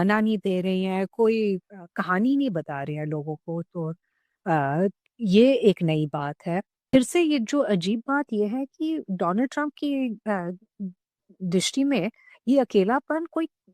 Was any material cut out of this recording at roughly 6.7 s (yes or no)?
yes